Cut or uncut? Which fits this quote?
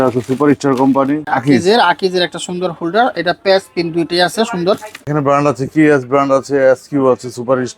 cut